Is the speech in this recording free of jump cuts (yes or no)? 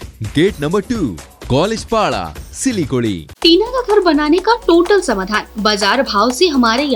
no